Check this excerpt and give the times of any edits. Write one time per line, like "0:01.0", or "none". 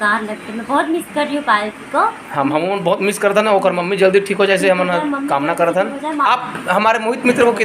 0:06.2